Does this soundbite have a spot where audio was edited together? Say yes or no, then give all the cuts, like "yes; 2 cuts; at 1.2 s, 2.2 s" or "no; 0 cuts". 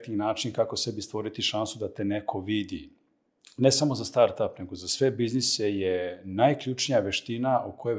no; 0 cuts